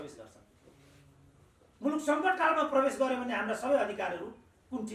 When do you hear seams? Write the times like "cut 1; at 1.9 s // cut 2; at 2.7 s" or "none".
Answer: none